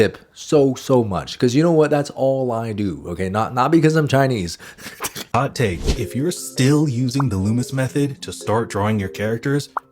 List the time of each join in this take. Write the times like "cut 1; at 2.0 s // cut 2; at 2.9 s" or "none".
cut 1; at 5.3 s